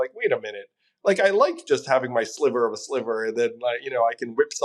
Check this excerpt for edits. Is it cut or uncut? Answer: uncut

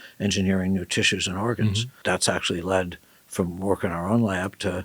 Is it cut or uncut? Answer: cut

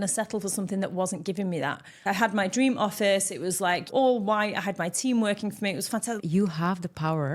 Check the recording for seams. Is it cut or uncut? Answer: cut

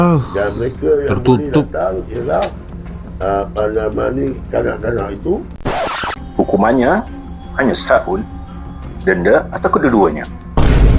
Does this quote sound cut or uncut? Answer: cut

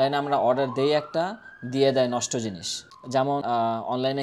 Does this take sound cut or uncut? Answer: uncut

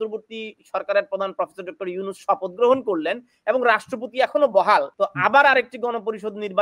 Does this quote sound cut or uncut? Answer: cut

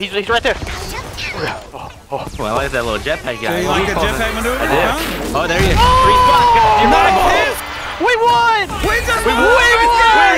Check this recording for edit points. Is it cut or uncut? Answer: cut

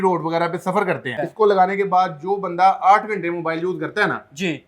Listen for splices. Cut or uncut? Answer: cut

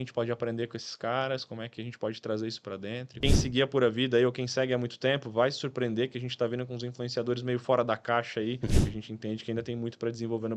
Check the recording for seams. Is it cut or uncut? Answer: cut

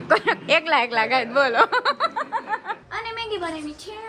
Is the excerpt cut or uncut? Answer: cut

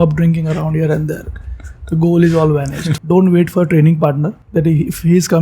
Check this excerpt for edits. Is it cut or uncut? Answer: cut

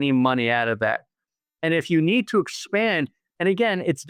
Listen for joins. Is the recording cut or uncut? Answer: uncut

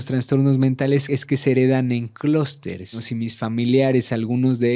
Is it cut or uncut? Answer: cut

